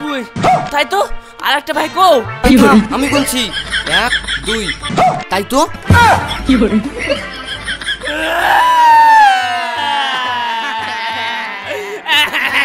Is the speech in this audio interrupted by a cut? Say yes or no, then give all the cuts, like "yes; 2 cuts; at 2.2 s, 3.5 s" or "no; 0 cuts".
no; 0 cuts